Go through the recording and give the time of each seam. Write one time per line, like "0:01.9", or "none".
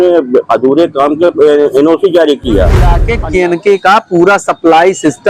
0:03.1